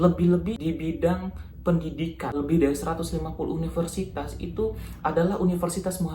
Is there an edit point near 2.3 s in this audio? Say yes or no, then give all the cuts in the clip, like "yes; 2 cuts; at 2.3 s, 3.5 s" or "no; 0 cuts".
yes; 1 cut; at 2.3 s